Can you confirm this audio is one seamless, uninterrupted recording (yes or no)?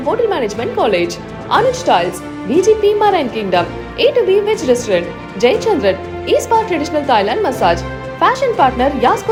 yes